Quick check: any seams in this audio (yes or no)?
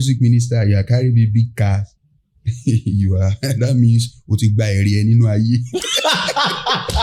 no